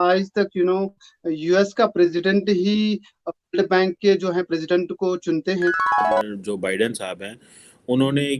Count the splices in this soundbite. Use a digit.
1